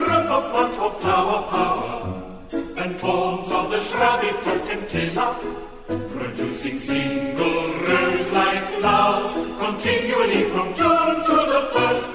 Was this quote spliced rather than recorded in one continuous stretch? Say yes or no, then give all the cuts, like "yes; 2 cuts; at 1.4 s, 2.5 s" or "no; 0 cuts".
no; 0 cuts